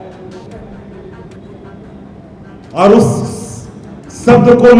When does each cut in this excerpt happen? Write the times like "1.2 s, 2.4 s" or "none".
none

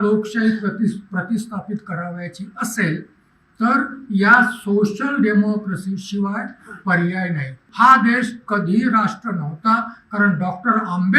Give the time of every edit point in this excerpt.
7.7 s

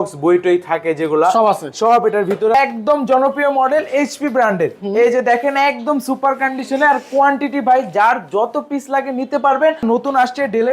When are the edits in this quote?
2.5 s, 9.8 s

